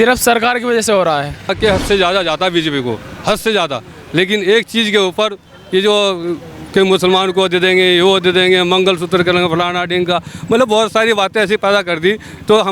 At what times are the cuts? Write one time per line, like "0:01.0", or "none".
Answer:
0:01.5